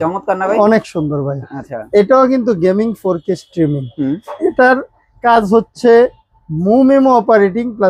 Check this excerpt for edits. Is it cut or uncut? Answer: uncut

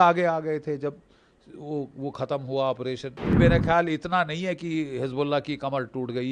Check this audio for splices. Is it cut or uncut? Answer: cut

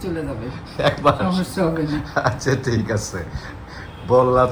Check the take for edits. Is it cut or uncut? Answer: uncut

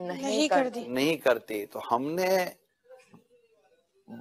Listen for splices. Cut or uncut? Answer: uncut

